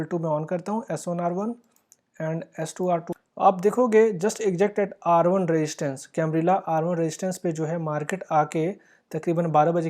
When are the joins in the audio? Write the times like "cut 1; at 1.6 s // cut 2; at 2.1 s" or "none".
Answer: cut 1; at 3.1 s